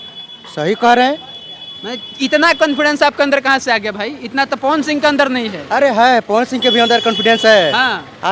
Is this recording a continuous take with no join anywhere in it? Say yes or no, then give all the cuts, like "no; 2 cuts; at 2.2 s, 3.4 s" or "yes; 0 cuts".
yes; 0 cuts